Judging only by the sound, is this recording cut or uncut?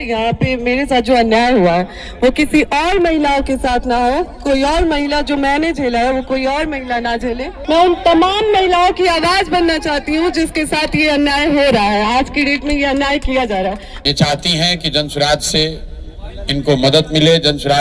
cut